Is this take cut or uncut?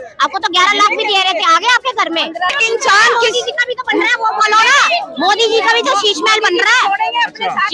cut